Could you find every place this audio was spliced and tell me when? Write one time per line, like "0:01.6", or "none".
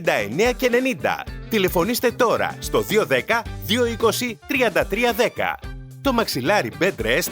0:05.6